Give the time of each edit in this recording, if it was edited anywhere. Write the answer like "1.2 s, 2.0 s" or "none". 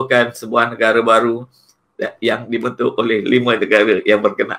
none